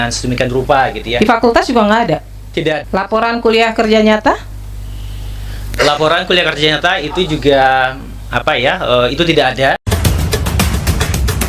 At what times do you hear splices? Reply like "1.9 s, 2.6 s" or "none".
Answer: 2.8 s, 9.8 s